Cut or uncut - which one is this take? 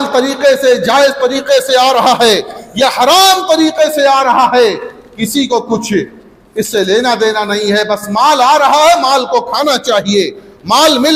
uncut